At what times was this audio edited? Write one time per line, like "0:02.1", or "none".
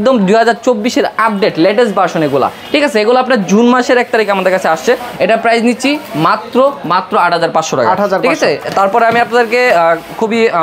none

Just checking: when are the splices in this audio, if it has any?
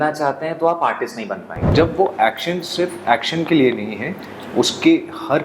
0:01.7

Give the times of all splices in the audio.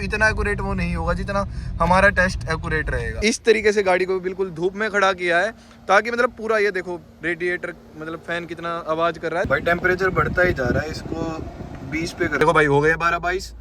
0:03.1
0:09.5
0:12.4

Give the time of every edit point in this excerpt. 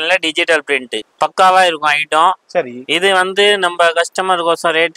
0:01.0

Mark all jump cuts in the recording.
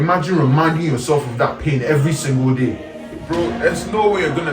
0:03.2

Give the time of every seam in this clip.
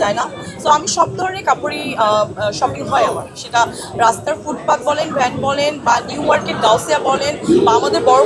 none

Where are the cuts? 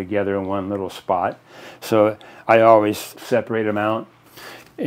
0:03.1

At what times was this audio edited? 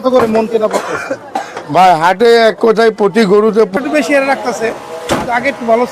0:03.7

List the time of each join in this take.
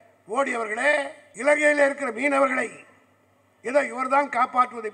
0:01.2

